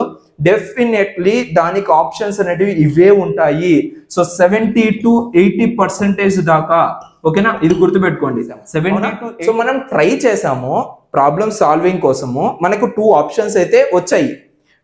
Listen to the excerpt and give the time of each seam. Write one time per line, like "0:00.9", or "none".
0:09.2